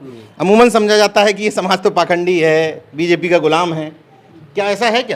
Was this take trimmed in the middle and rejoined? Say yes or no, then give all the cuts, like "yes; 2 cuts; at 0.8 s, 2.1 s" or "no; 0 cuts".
no; 0 cuts